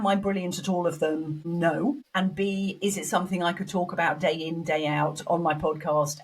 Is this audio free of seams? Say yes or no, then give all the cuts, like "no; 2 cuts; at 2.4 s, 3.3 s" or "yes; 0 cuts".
no; 2 cuts; at 1.4 s, 2.0 s